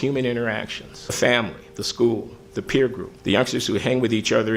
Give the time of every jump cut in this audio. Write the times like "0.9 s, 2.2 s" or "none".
1.2 s, 3.1 s